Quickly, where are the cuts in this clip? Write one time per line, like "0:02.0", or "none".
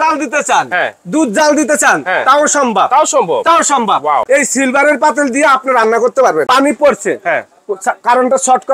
0:04.2
0:06.5